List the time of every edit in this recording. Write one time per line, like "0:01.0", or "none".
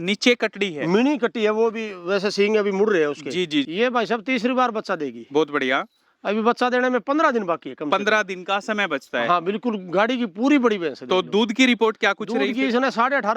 0:03.7

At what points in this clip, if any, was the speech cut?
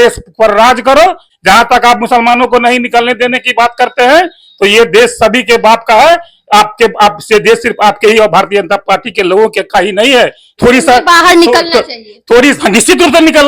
0:01.3
0:10.5

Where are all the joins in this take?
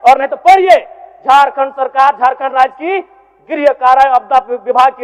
none

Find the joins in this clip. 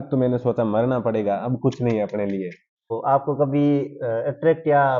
0:02.9

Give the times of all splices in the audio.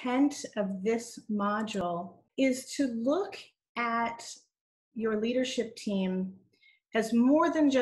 0:01.8

